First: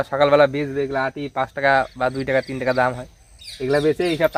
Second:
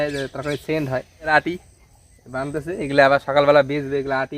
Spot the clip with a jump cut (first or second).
second